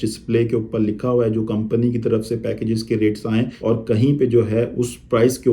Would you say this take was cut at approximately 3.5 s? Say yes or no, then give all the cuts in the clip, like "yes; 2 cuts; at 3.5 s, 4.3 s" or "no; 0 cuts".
yes; 1 cut; at 3.5 s